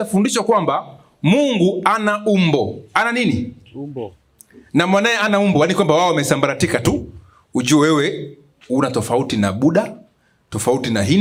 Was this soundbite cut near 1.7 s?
no; 0 cuts

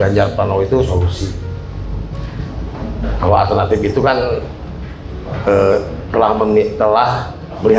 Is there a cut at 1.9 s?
no; 0 cuts

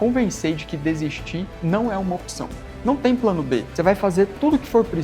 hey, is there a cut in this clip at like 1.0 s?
no; 1 cut; at 3.7 s

